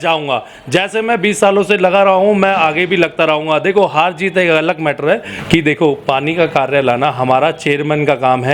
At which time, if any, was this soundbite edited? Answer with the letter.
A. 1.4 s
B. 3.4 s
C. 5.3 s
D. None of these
C